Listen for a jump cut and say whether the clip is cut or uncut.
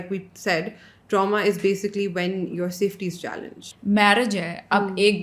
cut